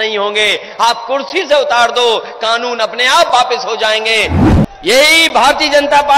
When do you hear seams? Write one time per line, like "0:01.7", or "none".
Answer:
0:04.4